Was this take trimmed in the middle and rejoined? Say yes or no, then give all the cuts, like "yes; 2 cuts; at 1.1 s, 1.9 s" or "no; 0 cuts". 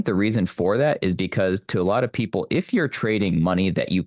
no; 0 cuts